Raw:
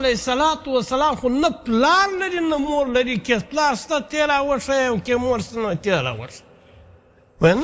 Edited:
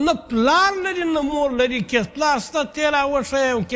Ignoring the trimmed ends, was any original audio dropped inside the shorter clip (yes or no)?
no